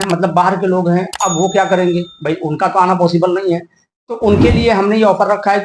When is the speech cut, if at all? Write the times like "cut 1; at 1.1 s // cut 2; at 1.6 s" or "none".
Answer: none